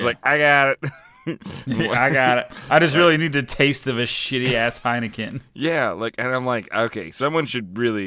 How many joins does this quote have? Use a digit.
0